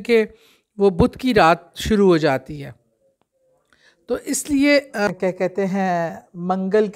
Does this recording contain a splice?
yes; 1 cut; at 5.1 s

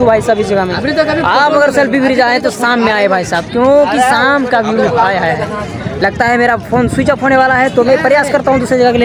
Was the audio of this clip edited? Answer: no; 0 cuts

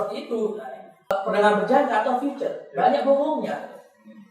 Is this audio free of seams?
no; 1 cut; at 1.1 s

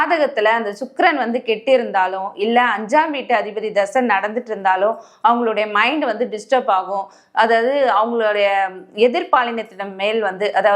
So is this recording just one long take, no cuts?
yes; 0 cuts

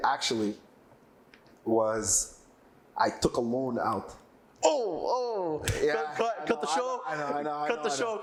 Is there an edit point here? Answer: no; 0 cuts

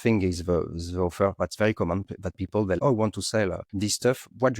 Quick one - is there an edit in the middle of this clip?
yes; 2 cuts; at 2.8 s, 3.7 s

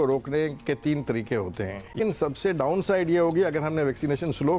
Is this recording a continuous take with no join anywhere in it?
no; 1 cut; at 2.0 s

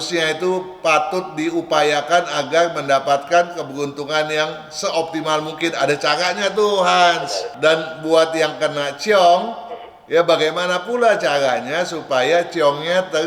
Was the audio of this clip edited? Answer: yes; 1 cut; at 7.4 s

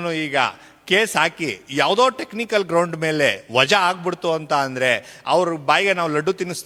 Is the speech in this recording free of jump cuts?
yes; 0 cuts

